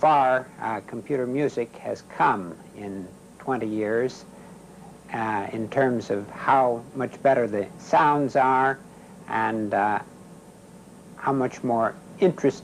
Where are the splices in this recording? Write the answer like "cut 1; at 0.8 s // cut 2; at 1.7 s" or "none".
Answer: cut 1; at 11.1 s